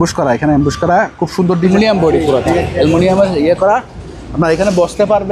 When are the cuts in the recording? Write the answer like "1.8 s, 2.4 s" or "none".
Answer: 1.7 s